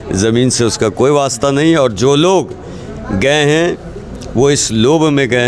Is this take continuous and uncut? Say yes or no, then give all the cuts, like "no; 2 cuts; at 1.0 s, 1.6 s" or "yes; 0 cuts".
yes; 0 cuts